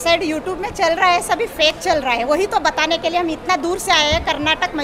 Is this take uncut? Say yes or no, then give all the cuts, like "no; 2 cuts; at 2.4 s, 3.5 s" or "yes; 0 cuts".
yes; 0 cuts